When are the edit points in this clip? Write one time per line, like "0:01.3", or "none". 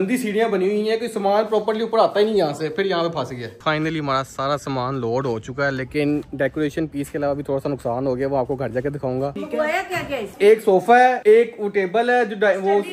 0:03.4
0:09.3
0:10.3